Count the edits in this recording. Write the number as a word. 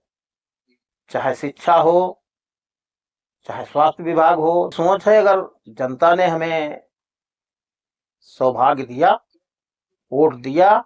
one